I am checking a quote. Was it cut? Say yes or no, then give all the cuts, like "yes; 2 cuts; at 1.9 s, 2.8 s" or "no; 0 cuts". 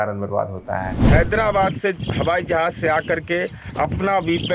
yes; 1 cut; at 1.0 s